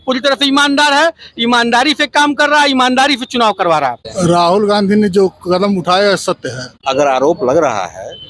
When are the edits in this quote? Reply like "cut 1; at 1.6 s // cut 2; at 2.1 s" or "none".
cut 1; at 4.0 s // cut 2; at 6.7 s